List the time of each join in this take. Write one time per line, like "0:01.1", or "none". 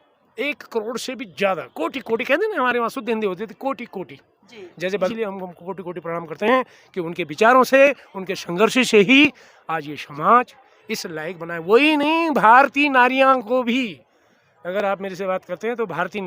0:05.1